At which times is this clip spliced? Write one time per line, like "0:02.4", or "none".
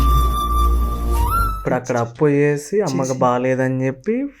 0:01.5